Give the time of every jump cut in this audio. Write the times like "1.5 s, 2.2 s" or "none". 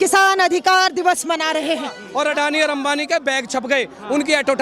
2.0 s